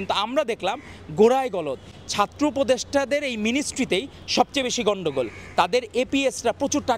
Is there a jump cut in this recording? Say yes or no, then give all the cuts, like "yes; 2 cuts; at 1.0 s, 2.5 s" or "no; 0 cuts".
no; 0 cuts